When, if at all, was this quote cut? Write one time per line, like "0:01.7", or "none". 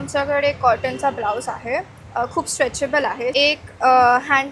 0:03.3